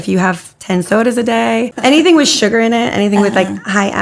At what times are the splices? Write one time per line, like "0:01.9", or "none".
0:01.7